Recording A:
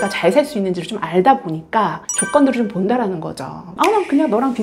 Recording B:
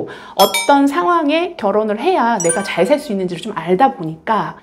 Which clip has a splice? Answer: A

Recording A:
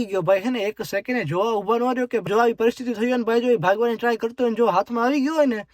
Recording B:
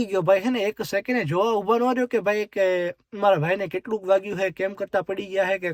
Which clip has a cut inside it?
A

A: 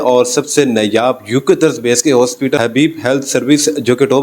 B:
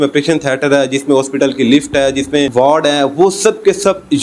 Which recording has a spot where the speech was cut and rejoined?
B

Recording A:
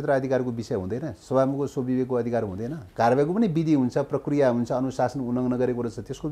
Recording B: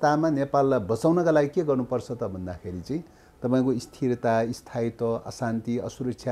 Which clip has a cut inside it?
A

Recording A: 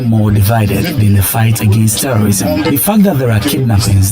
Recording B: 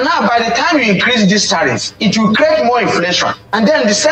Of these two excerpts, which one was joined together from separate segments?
A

